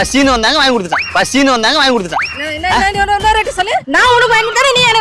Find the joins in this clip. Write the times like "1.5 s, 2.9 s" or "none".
3.9 s